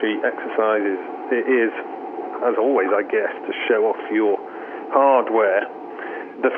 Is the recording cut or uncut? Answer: uncut